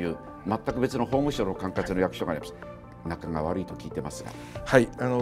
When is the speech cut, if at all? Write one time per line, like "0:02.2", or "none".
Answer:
0:02.9